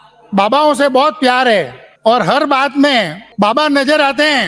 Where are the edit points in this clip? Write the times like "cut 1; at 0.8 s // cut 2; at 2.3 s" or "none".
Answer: cut 1; at 1.8 s // cut 2; at 3.2 s